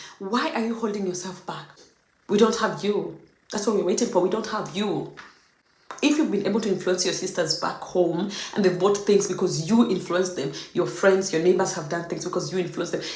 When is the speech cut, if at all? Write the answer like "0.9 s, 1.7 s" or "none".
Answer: 1.8 s

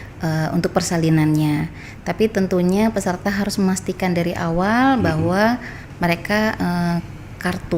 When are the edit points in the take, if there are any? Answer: none

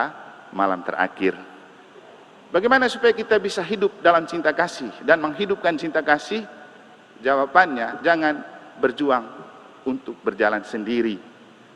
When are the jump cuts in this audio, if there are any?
none

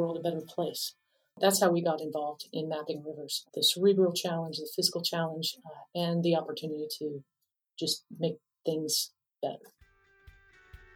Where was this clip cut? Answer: 10.0 s

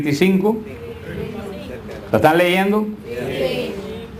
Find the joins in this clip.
1.5 s

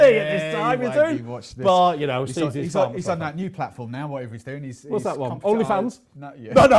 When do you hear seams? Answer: none

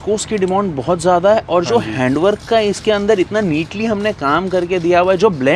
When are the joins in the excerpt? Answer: none

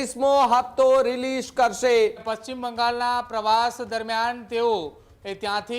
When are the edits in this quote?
2.3 s

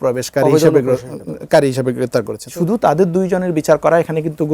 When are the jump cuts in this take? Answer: 2.4 s

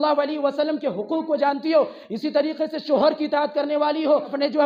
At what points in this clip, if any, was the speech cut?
none

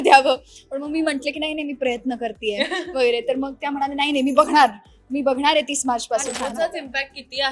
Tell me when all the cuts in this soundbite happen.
6.3 s

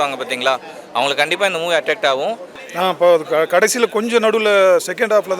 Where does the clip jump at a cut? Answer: 2.5 s

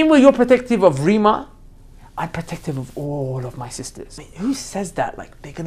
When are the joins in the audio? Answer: 4.2 s

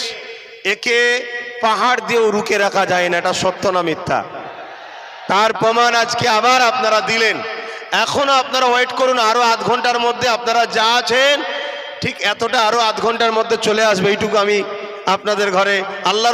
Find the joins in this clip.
none

